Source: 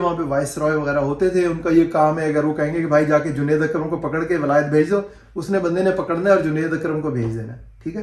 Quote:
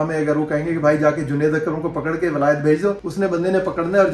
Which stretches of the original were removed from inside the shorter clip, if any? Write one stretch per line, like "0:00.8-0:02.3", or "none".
0:05.1-0:05.4